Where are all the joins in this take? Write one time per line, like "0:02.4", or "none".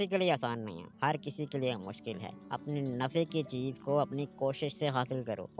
0:02.5